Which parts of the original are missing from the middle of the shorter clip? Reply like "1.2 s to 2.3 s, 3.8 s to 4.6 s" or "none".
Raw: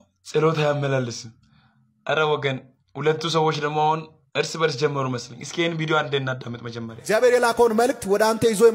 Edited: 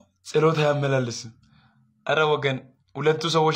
none